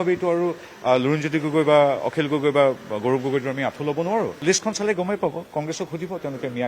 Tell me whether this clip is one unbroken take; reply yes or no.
no